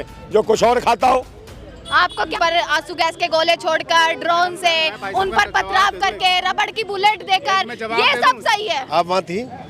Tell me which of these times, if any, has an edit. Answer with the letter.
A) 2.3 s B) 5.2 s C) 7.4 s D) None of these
A